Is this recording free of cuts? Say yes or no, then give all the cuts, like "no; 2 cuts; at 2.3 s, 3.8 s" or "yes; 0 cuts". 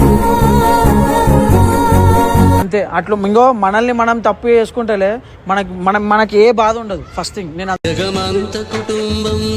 yes; 0 cuts